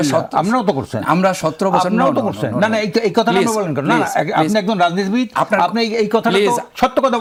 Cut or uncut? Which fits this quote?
uncut